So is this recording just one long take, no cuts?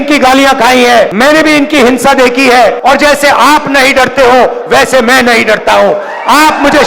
no; 2 cuts; at 1.1 s, 2.8 s

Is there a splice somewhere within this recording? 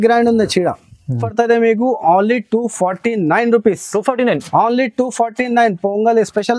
yes; 1 cut; at 1.2 s

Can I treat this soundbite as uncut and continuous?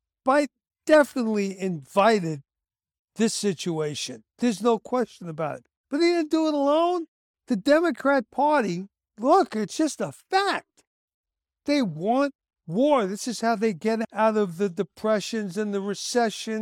yes; 0 cuts

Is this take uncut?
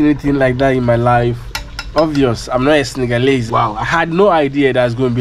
no; 1 cut; at 3.4 s

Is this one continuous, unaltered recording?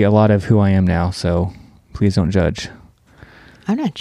yes; 0 cuts

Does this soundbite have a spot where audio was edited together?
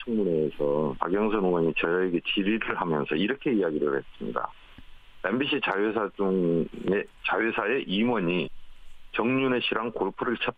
no; 0 cuts

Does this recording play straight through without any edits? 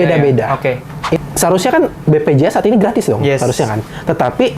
no; 1 cut; at 1.2 s

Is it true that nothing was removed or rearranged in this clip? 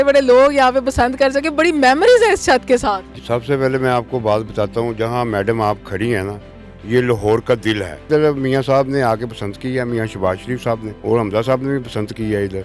no; 3 cuts; at 3.1 s, 8.1 s, 10.9 s

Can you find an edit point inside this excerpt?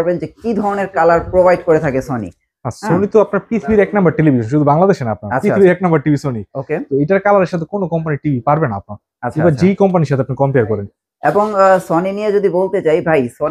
no; 0 cuts

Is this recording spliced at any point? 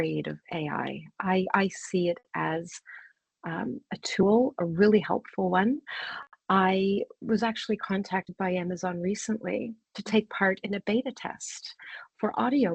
no; 0 cuts

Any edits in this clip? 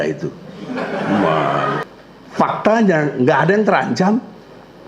yes; 1 cut; at 1.9 s

